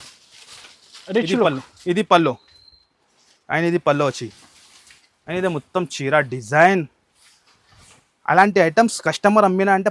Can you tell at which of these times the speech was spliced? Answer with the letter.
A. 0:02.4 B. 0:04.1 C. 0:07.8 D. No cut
D